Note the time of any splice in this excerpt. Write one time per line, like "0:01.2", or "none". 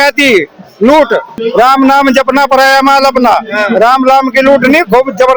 0:01.4